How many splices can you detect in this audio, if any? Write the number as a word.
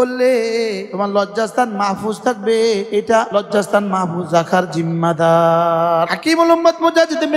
three